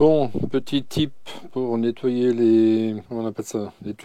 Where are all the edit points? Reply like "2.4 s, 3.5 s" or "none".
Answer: 3.0 s